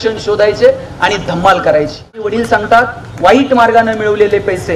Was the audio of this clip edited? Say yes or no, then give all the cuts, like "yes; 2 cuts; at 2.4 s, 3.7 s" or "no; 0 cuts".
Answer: yes; 1 cut; at 2.2 s